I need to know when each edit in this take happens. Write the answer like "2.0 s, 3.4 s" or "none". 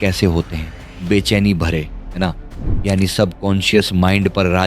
2.7 s